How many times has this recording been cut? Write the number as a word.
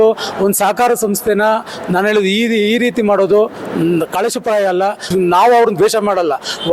one